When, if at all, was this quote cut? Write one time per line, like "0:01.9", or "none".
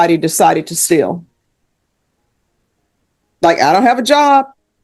none